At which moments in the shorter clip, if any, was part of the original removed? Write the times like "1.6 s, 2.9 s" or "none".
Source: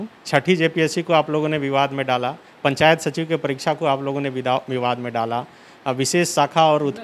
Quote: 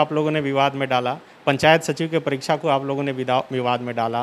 none